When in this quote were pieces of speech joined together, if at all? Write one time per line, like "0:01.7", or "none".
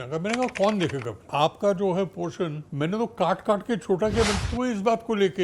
0:01.2
0:02.6
0:04.4